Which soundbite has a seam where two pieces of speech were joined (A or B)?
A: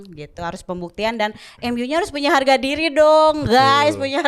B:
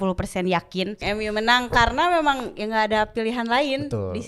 B